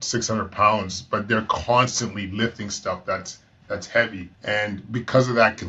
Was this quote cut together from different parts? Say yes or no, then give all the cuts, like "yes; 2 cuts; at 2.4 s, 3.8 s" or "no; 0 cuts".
yes; 1 cut; at 4.3 s